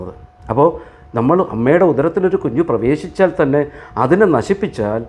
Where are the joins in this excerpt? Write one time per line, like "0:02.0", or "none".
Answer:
none